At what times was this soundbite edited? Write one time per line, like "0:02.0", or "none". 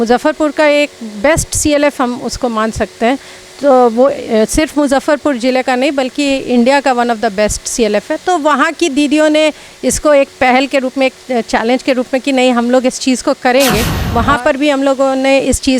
0:14.0